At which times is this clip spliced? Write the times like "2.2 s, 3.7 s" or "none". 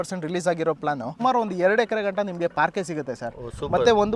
1.1 s